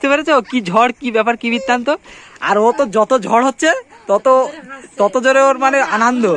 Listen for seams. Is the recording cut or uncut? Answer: uncut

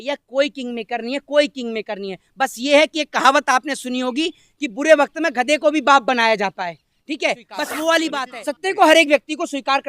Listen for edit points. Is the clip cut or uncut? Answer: cut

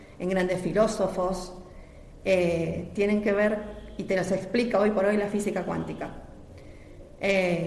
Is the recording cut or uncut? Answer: uncut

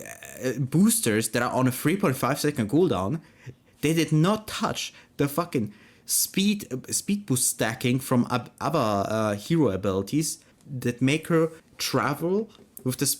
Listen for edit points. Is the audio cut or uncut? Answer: cut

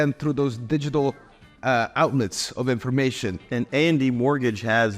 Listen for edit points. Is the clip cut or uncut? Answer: cut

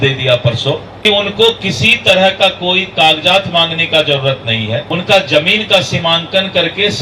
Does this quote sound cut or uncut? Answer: cut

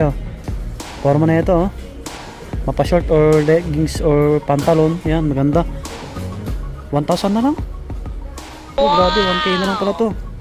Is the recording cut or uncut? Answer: uncut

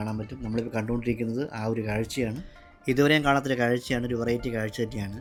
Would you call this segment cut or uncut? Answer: uncut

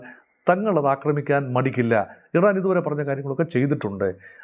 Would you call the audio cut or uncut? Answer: uncut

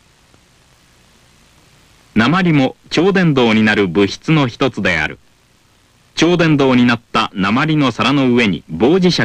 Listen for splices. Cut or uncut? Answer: cut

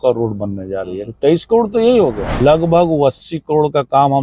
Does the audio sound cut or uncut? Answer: cut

